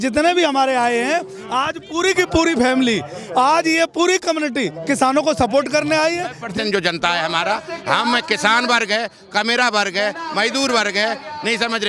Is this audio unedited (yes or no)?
no